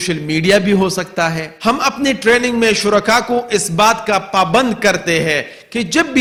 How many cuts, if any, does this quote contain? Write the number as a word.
zero